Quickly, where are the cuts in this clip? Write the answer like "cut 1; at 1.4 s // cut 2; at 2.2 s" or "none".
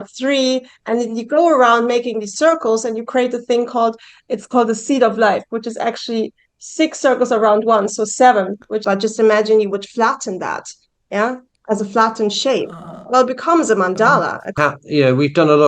cut 1; at 8.8 s // cut 2; at 14.4 s